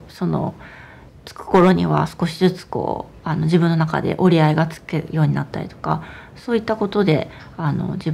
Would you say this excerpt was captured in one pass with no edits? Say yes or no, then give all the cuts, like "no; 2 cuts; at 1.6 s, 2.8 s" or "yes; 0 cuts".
no; 1 cut; at 1.0 s